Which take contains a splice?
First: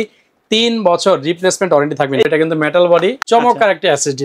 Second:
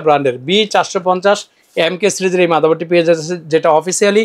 first; 2 cuts; at 2.3 s, 3.2 s

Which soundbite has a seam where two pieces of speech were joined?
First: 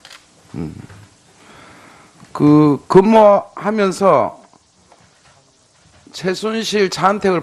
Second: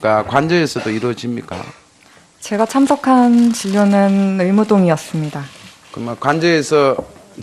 first; 1 cut; at 1.9 s

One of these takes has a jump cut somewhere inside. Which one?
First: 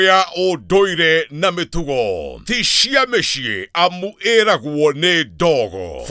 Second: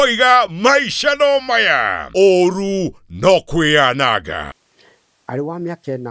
second; 1 cut; at 4.4 s

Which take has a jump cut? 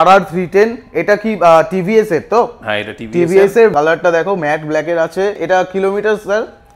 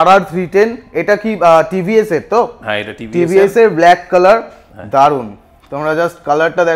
first; 2 cuts; at 3.7 s, 5.4 s

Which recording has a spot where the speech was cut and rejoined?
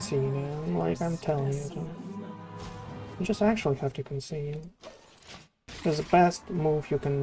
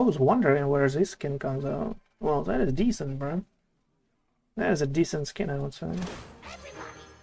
second; 1 cut; at 6.1 s

